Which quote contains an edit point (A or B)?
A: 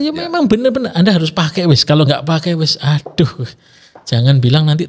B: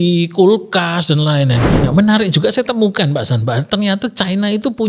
B